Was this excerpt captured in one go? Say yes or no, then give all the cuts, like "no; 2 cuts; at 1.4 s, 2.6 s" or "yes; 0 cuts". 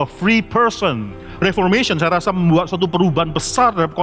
no; 1 cut; at 1.3 s